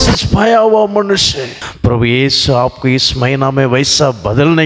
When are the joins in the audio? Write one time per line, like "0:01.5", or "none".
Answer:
0:01.6